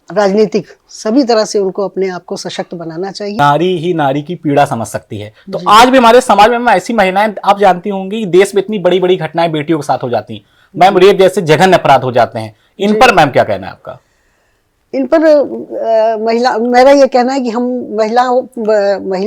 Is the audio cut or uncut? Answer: cut